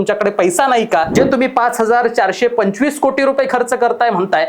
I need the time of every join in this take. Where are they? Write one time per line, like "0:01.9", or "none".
0:01.1